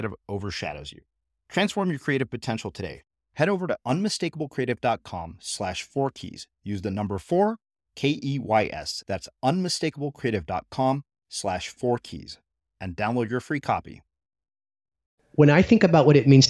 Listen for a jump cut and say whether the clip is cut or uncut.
cut